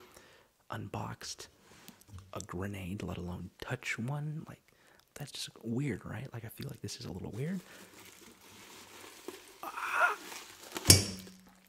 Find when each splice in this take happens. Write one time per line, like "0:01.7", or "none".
none